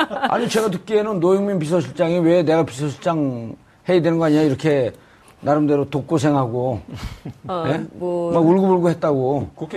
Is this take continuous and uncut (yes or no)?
no